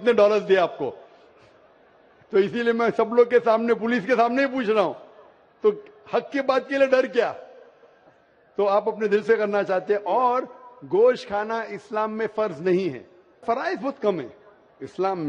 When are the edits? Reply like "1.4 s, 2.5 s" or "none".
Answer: none